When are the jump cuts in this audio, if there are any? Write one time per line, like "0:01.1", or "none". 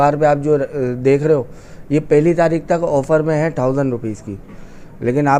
none